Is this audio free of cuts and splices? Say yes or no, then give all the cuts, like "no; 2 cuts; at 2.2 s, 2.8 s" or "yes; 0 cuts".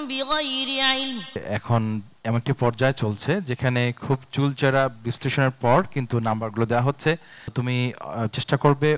no; 2 cuts; at 1.4 s, 7.6 s